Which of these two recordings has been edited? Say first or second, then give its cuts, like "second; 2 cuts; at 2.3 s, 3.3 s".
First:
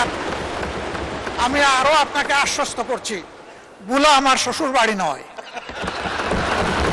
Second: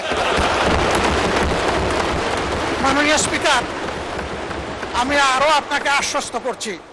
second; 1 cut; at 2.6 s